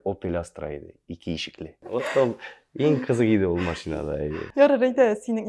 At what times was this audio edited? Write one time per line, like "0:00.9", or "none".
0:01.8